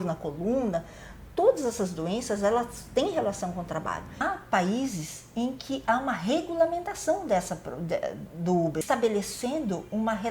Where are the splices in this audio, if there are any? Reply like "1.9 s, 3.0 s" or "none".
4.2 s, 8.8 s